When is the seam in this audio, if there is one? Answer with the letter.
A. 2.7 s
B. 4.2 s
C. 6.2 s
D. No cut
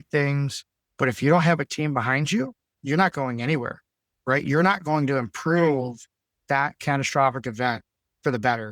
A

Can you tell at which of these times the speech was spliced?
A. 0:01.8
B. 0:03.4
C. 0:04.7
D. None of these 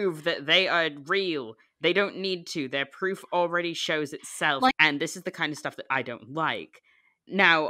C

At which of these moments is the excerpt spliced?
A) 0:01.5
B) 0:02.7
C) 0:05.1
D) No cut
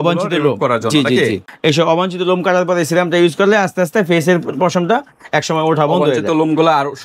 A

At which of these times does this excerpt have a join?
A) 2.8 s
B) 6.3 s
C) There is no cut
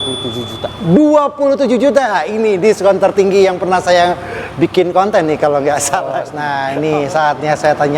B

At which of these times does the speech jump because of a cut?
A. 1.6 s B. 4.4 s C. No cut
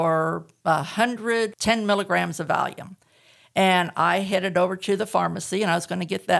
A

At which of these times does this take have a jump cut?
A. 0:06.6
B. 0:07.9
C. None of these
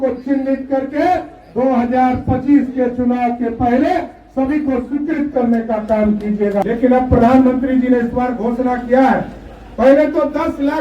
A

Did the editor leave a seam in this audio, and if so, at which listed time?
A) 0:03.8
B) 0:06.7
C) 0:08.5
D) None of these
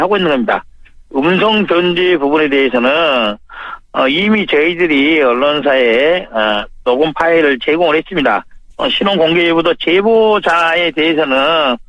D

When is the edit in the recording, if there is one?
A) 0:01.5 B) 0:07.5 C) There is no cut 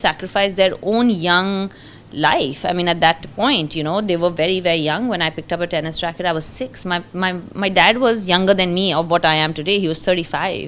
C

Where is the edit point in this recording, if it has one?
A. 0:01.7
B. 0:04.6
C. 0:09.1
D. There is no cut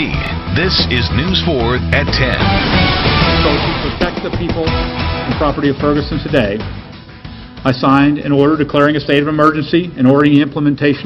D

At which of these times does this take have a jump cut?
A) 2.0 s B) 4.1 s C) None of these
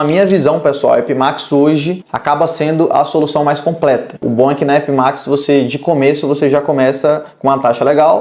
B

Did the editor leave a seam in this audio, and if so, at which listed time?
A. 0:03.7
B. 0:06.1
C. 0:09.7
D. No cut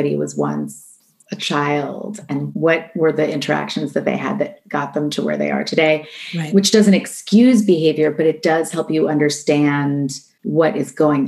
D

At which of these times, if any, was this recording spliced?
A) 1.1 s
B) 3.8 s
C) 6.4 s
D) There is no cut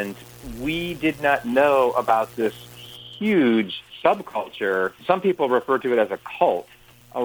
B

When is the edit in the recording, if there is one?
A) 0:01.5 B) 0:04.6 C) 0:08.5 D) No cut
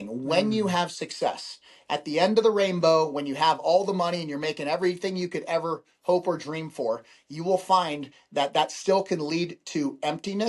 D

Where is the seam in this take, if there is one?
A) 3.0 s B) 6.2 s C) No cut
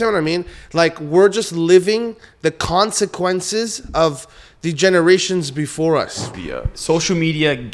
B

